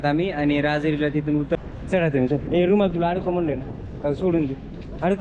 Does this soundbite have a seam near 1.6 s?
yes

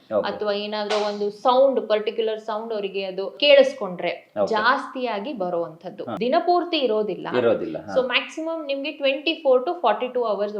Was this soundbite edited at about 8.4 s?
no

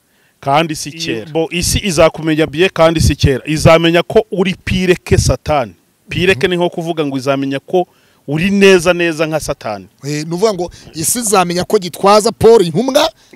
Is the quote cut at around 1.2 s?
yes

